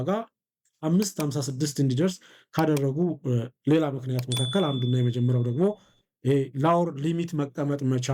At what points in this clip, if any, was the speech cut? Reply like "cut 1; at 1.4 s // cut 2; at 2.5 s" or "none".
none